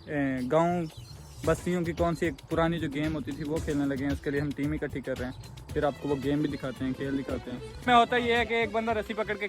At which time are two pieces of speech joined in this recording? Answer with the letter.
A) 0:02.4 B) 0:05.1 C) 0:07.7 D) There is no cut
C